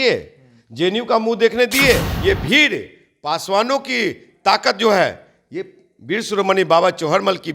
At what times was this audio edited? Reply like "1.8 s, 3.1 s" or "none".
2.1 s